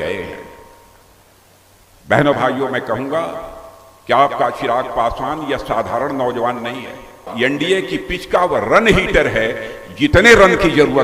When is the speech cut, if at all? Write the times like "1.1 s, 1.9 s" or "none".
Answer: 7.3 s